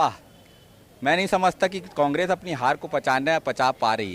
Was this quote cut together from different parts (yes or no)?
no